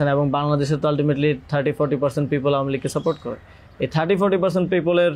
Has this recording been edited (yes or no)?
no